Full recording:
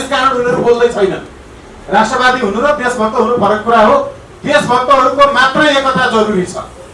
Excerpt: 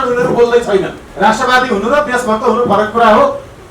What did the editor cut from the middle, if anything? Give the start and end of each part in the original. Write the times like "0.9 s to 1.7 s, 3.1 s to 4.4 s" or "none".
1.3 s to 1.7 s

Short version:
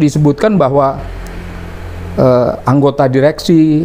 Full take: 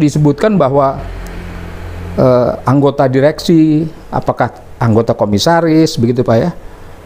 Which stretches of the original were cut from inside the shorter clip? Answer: none

